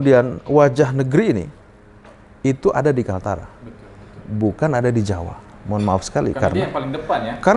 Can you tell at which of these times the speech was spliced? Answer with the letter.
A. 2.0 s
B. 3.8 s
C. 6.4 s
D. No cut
D